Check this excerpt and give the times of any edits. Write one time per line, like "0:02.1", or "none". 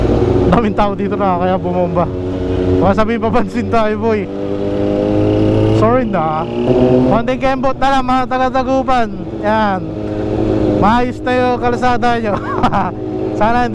0:07.0